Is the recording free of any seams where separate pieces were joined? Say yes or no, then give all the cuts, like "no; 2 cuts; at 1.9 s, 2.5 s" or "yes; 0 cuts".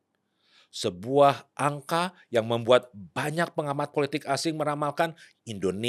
yes; 0 cuts